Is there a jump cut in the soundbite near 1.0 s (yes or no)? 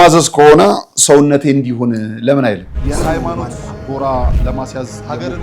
no